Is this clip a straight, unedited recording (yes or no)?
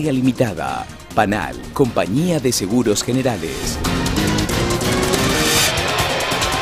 yes